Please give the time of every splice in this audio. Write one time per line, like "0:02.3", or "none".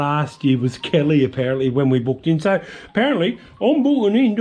none